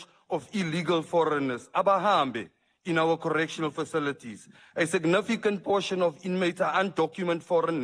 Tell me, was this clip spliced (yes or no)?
no